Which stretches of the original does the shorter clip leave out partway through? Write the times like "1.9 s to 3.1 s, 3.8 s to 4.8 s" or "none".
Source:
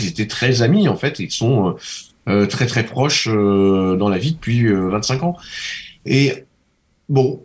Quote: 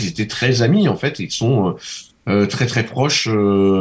none